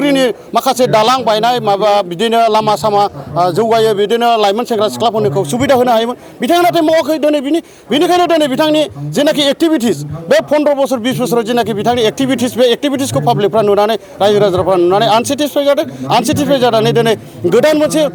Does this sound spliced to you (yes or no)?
no